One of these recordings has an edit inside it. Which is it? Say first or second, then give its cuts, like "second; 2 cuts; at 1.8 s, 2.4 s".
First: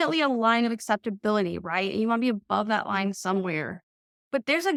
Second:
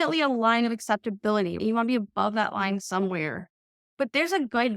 second; 1 cut; at 1.6 s